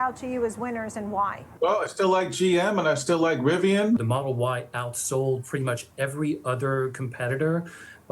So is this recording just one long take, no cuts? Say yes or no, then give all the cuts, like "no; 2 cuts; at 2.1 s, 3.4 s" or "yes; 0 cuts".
no; 1 cut; at 4.0 s